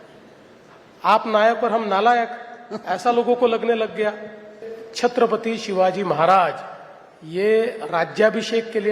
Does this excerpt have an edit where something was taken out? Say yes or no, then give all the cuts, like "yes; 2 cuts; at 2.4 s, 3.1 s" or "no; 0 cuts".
yes; 1 cut; at 4.6 s